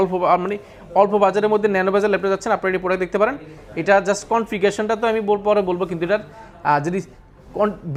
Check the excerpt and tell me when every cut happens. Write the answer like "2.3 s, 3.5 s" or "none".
none